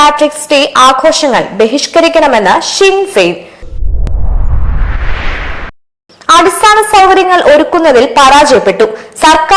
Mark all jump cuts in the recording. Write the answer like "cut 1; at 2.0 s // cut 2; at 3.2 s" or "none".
cut 1; at 3.8 s // cut 2; at 5.8 s